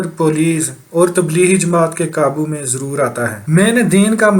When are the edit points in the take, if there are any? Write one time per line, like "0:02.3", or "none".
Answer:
0:03.4